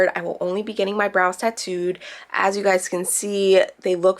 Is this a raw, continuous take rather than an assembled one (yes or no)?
yes